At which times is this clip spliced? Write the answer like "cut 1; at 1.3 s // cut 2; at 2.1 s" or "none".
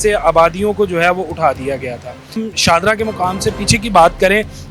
cut 1; at 2.4 s